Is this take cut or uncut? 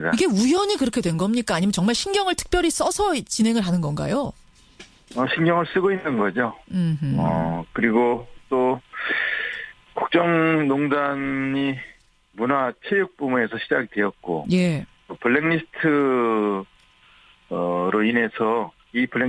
uncut